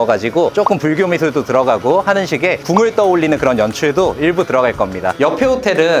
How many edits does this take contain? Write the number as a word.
one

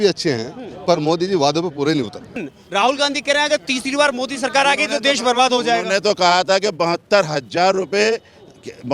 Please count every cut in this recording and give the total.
one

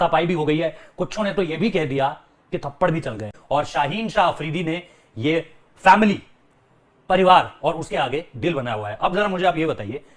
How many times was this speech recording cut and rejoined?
one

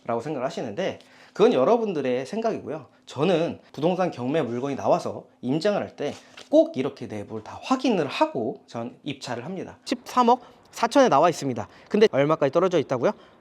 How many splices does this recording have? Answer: one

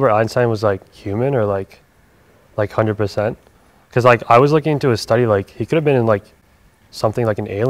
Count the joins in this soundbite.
zero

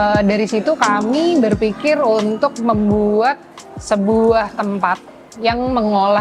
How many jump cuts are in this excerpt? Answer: zero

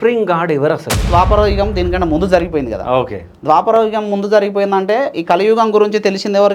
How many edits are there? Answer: one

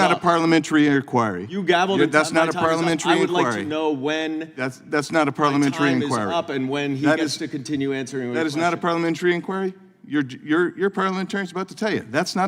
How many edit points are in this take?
zero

